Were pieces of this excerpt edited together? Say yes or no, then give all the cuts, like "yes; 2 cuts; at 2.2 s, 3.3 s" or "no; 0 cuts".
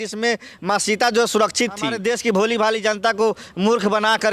yes; 1 cut; at 1.9 s